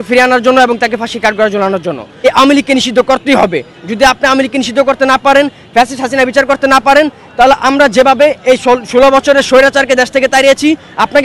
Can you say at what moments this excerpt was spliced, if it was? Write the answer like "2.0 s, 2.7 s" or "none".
2.2 s